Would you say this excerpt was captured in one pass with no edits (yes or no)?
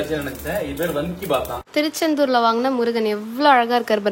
no